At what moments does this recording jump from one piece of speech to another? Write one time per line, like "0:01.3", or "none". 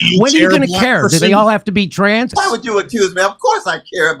0:02.4